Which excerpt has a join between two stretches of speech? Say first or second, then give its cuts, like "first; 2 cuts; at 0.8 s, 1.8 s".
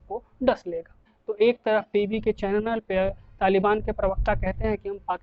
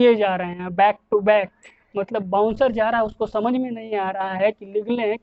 first; 1 cut; at 1.2 s